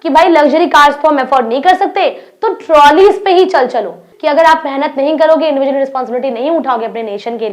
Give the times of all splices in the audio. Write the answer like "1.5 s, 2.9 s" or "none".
4.1 s